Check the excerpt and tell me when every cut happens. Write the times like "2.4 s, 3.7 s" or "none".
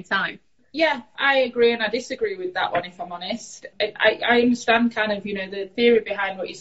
1.1 s, 3.7 s, 5.7 s